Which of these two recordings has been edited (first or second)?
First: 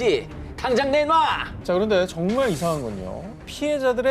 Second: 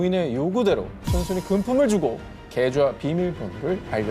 first